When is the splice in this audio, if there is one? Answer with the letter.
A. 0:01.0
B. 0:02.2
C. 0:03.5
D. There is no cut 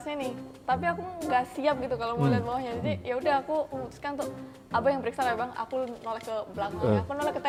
D